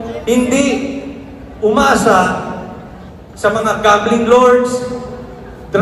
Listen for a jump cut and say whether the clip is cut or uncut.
uncut